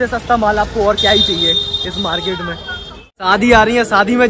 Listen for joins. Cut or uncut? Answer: cut